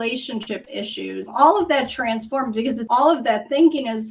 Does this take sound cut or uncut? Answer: cut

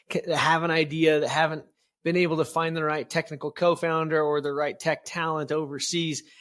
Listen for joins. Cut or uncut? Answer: uncut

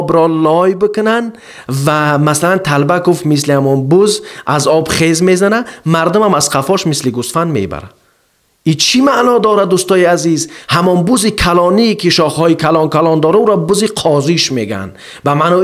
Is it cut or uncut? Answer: cut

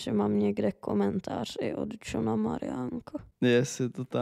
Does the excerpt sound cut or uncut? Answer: cut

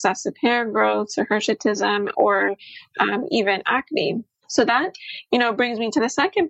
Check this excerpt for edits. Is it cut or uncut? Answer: cut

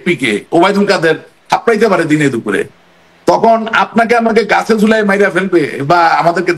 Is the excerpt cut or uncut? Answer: uncut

